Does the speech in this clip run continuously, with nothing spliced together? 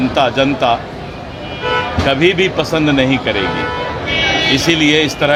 yes; 0 cuts

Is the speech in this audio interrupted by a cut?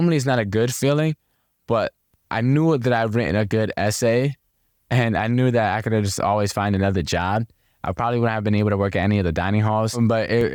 no; 0 cuts

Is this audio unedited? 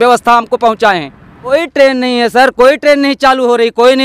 no; 1 cut; at 1.5 s

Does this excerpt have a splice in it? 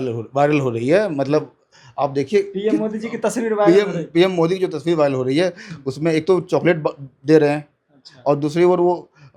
no; 0 cuts

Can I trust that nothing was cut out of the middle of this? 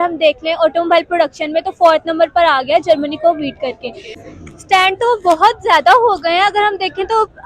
no; 1 cut; at 4.1 s

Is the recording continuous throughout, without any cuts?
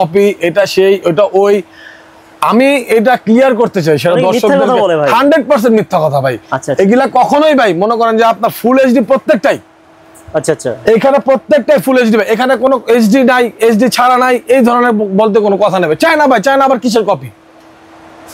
yes; 0 cuts

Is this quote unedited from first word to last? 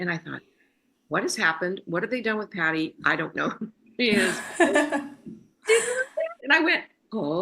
no; 1 cut; at 6.4 s

